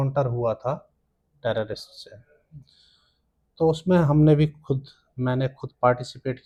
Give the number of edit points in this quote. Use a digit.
0